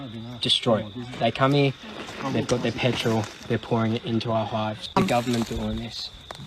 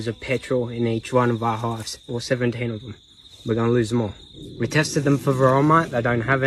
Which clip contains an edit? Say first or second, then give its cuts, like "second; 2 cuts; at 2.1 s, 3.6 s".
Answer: first; 1 cut; at 4.8 s